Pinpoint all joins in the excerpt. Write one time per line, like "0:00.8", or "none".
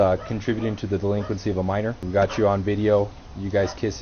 0:02.0